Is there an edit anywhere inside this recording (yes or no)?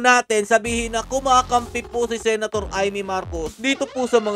no